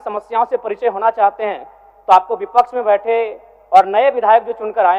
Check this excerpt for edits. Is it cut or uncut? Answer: uncut